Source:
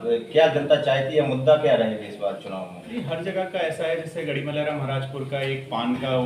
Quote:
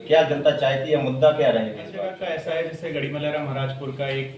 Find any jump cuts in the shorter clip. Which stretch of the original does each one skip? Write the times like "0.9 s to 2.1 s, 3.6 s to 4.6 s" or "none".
2.3 s to 3.4 s